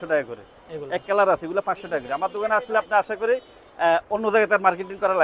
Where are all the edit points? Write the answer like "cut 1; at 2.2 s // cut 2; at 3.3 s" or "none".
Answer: none

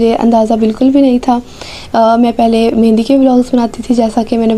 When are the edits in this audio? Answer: none

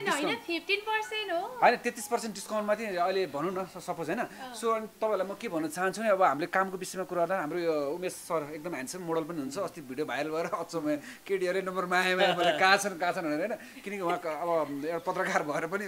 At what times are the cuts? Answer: none

